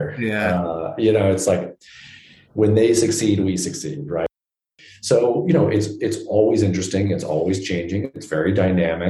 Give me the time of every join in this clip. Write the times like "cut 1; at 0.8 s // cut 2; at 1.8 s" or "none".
cut 1; at 4.5 s